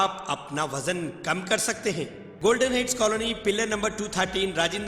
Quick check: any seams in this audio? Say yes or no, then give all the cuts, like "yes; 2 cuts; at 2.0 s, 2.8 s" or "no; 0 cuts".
yes; 1 cut; at 2.2 s